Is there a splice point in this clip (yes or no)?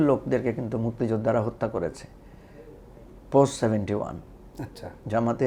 no